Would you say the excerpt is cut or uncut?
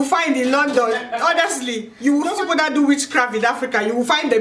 cut